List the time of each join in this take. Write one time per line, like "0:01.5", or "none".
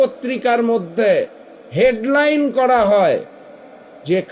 none